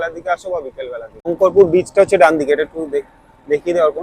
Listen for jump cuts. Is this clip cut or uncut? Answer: cut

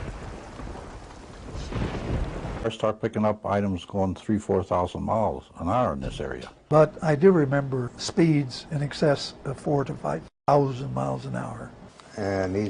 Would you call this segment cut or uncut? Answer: uncut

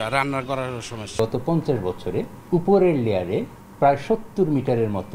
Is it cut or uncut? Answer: cut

